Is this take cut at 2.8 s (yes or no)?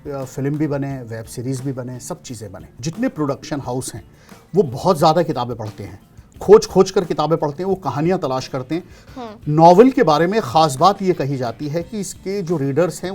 yes